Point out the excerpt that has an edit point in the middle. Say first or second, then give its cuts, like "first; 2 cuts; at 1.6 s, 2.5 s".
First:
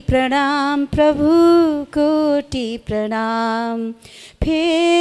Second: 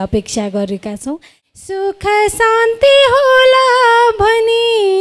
second; 1 cut; at 1.3 s